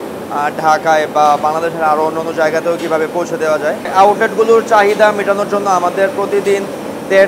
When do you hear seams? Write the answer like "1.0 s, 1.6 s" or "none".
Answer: 3.9 s